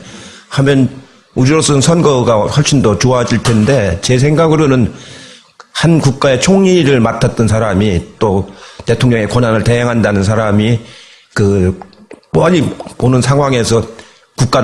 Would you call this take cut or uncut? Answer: cut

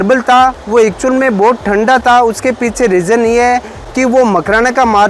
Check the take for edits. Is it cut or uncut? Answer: uncut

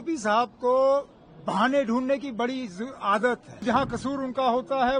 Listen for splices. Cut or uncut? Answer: cut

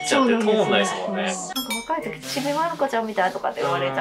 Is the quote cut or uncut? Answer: cut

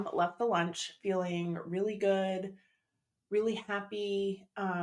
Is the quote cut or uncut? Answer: uncut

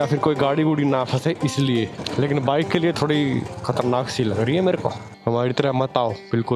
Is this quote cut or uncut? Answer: cut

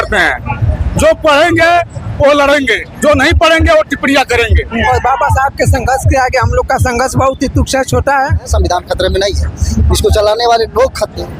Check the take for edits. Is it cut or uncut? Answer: cut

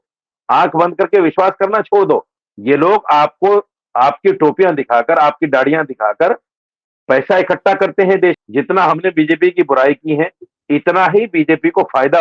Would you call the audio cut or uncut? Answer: cut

